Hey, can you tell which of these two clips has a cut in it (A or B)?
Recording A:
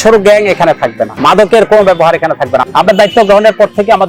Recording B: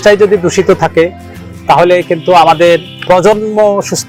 A